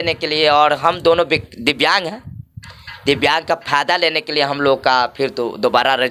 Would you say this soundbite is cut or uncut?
uncut